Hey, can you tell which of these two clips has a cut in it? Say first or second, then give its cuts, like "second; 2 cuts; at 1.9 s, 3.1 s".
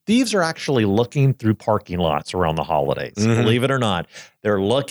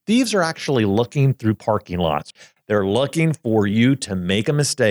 second; 1 cut; at 2.3 s